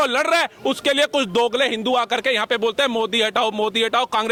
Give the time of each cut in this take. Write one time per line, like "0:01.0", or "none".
none